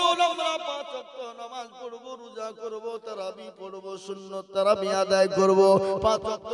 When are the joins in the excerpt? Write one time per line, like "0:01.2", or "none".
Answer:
none